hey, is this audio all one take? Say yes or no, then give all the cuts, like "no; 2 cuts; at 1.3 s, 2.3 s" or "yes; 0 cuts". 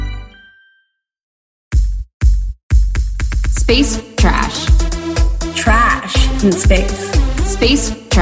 no; 1 cut; at 1.4 s